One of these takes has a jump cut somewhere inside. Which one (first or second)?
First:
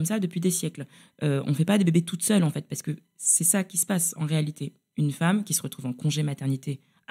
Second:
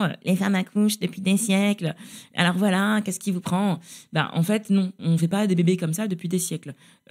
second